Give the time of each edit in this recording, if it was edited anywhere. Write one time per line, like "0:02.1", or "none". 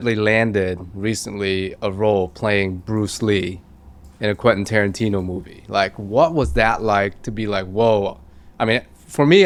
none